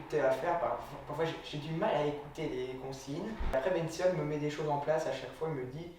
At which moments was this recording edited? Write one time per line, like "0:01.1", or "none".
0:03.5